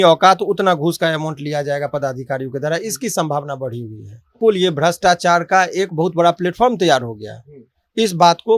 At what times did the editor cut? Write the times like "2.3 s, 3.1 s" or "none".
4.4 s